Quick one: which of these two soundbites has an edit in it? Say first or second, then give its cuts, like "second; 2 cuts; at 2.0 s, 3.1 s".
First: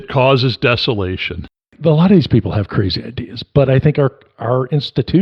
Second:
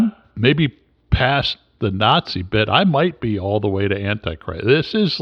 first; 1 cut; at 1.7 s